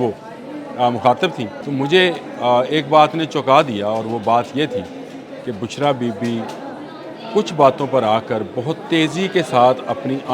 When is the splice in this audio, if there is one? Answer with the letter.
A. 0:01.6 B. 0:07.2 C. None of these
A